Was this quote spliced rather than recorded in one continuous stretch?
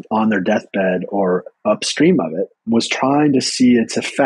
yes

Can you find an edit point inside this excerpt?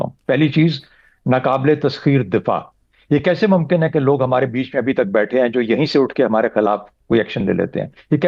no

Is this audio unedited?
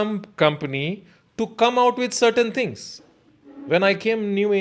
yes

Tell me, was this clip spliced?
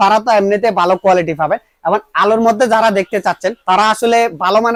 no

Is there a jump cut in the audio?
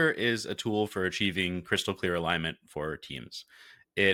no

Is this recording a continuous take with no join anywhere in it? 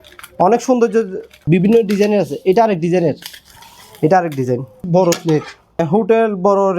no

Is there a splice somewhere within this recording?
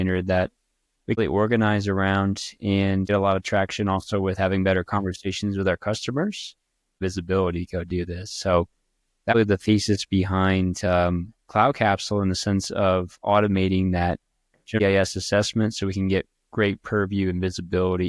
yes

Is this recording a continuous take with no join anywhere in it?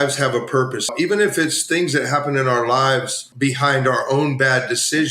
no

